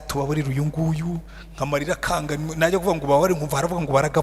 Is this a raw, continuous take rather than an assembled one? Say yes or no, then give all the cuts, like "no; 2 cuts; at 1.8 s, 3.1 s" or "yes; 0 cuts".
yes; 0 cuts